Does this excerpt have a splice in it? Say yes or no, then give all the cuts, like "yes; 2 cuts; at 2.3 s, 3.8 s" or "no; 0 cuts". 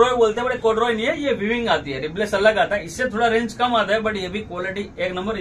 no; 0 cuts